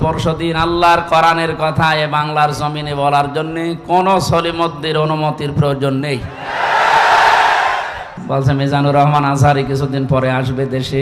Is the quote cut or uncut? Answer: cut